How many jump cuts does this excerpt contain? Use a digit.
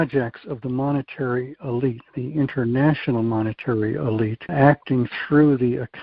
1